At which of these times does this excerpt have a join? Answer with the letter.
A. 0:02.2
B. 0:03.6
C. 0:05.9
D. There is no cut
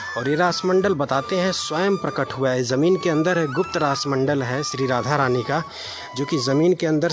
D